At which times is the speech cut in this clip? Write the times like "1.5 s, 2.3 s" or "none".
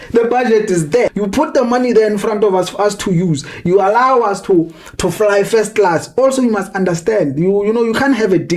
1.1 s